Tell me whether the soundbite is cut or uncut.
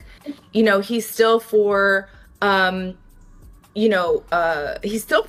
uncut